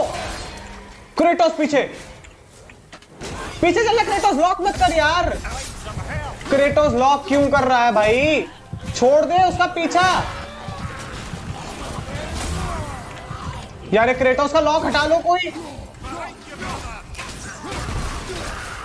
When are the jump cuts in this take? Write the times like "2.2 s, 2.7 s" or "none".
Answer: none